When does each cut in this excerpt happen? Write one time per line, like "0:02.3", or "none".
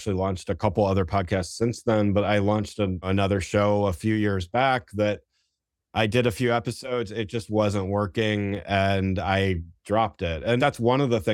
0:03.1
0:10.6